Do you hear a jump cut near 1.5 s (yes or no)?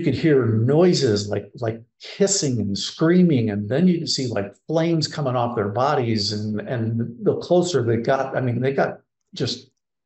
no